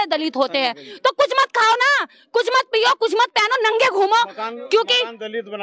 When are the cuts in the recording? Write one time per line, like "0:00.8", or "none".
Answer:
none